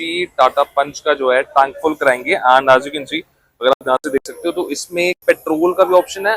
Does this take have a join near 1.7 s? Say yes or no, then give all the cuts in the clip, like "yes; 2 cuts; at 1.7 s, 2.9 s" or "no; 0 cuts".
no; 0 cuts